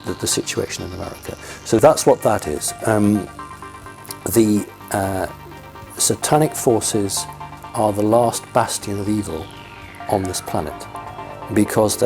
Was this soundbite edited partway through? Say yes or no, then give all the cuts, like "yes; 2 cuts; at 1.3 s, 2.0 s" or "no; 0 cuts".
yes; 1 cut; at 1.8 s